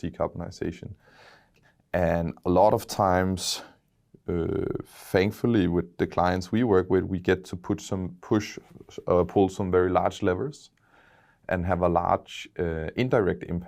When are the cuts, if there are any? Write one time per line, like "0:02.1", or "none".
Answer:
0:01.5

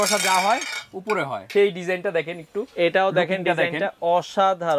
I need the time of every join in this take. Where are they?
0:01.4

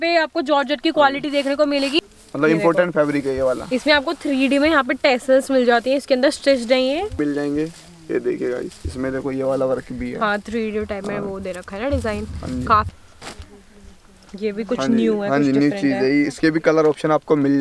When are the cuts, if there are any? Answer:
0:02.0
0:07.2
0:12.9

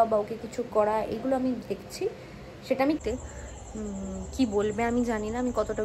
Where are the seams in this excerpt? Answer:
0:03.0

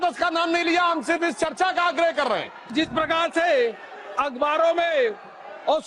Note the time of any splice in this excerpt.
0:02.7

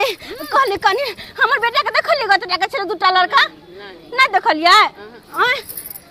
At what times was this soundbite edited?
none

